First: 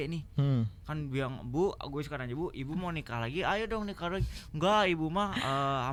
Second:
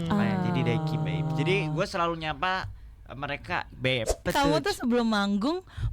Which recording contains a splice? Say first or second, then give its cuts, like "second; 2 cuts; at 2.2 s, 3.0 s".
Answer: second; 1 cut; at 4.2 s